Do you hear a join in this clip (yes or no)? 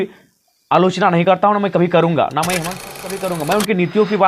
yes